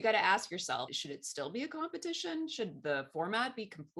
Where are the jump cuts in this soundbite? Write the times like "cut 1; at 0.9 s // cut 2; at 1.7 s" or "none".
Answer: none